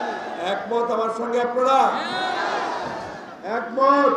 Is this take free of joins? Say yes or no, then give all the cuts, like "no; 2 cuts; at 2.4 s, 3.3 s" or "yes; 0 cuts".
yes; 0 cuts